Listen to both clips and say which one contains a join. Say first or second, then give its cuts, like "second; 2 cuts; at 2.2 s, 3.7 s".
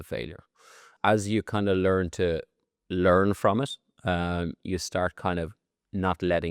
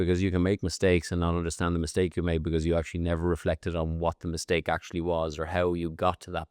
first; 1 cut; at 0.9 s